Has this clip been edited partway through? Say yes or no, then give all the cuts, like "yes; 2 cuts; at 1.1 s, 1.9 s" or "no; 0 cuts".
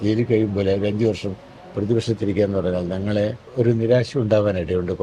yes; 1 cut; at 3.4 s